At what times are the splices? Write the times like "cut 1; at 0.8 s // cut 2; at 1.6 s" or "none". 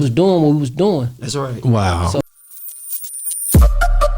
cut 1; at 2.2 s